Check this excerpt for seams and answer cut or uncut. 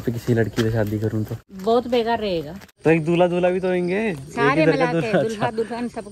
cut